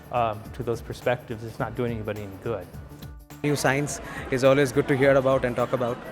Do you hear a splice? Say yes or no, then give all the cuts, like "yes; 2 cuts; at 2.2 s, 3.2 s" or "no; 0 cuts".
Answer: yes; 1 cut; at 3.2 s